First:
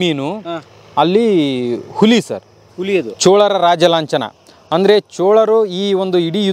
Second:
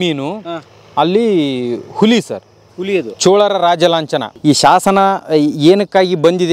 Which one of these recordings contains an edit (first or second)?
second